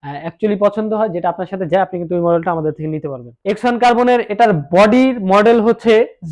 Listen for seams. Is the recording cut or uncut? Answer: cut